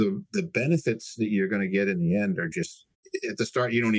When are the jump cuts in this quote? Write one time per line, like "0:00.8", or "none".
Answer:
0:02.9